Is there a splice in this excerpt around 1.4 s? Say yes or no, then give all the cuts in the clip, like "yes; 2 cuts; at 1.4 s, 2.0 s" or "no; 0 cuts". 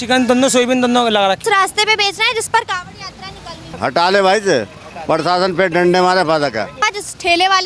yes; 3 cuts; at 1.4 s, 3.7 s, 6.8 s